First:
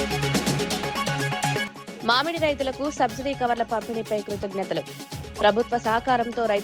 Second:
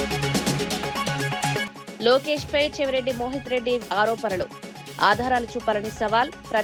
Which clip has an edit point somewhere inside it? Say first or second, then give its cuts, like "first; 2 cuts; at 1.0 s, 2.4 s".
first; 1 cut; at 1.8 s